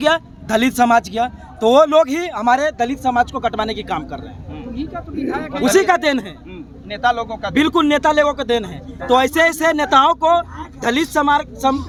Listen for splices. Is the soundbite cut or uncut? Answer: uncut